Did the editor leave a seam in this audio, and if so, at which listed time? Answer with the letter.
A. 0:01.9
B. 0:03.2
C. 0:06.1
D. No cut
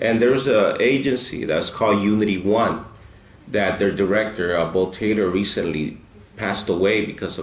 D